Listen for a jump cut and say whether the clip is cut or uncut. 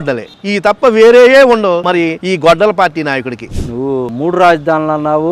cut